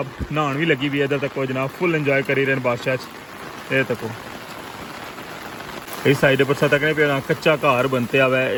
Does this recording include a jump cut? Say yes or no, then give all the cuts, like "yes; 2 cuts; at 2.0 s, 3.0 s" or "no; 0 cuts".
no; 0 cuts